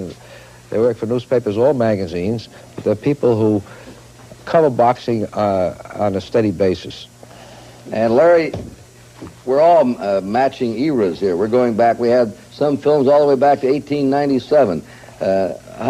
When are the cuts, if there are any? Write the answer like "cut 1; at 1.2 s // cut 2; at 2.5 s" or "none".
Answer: cut 1; at 12.4 s

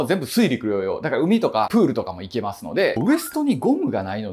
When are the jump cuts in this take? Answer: cut 1; at 3.0 s

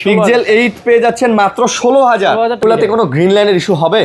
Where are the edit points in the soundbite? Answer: cut 1; at 2.6 s

